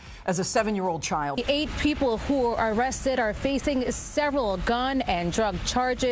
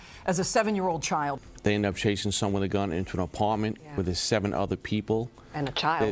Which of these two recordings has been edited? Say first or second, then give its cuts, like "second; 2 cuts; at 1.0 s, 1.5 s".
second; 1 cut; at 1.4 s